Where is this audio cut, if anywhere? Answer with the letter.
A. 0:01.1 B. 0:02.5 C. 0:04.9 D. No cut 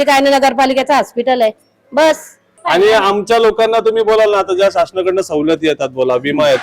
B